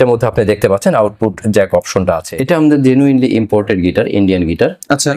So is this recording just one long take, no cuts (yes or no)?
no